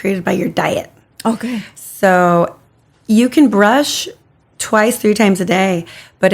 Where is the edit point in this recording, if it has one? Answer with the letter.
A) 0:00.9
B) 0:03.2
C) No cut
C